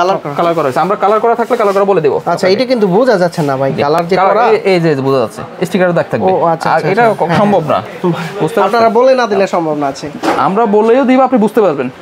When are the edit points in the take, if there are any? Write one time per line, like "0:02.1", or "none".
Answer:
none